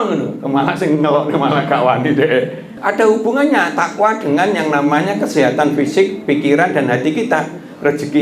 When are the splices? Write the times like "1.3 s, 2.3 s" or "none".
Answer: 2.7 s